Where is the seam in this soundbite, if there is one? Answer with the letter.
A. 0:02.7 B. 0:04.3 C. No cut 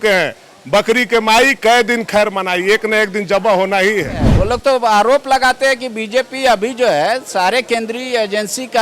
B